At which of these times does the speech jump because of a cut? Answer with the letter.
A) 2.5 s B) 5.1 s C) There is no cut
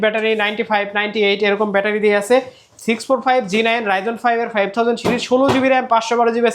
C